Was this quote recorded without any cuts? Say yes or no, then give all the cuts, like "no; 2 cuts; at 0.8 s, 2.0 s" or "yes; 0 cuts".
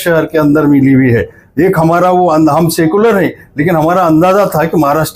yes; 0 cuts